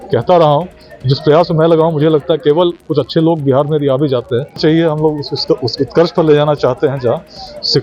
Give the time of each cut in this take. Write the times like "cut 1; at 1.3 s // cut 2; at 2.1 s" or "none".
cut 1; at 4.6 s